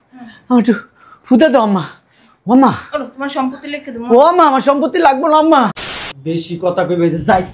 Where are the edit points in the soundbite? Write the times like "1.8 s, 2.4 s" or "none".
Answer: 5.7 s